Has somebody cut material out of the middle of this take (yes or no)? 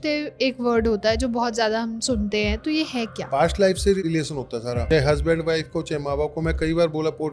no